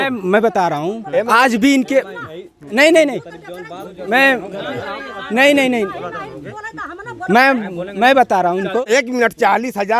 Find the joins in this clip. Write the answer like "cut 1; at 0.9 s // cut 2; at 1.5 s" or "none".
cut 1; at 8.8 s